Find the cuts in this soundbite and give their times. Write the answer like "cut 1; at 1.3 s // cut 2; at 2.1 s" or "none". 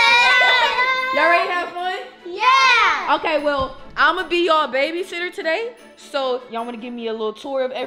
none